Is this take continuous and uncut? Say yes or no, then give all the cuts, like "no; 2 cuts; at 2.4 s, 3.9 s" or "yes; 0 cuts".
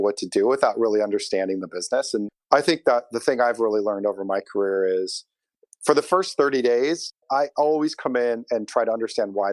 no; 2 cuts; at 2.3 s, 7.1 s